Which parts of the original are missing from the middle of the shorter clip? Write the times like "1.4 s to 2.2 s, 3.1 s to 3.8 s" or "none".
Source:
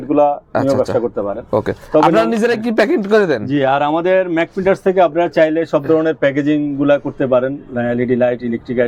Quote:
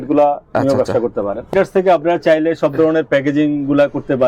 1.4 s to 4.5 s